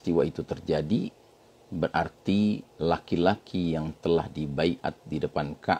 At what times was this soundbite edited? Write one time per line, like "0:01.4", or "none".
none